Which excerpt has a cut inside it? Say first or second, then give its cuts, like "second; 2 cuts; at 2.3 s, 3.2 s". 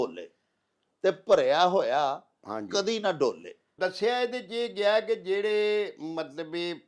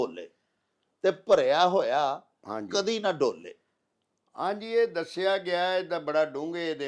first; 1 cut; at 3.7 s